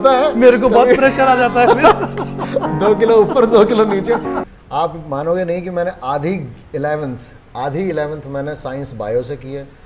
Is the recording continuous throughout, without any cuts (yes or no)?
no